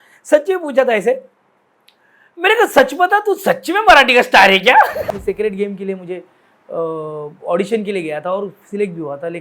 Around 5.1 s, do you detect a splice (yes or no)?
yes